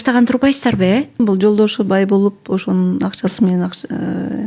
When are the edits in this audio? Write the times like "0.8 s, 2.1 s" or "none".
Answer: 1.2 s